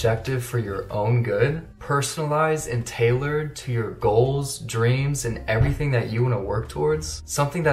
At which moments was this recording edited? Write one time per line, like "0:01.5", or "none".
none